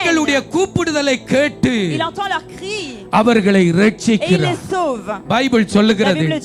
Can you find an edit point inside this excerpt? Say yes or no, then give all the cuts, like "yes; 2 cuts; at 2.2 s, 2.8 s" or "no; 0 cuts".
no; 0 cuts